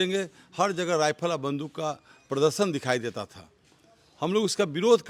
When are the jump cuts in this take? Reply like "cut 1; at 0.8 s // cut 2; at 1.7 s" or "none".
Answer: none